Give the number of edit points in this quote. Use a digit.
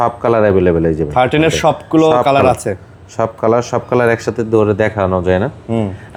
0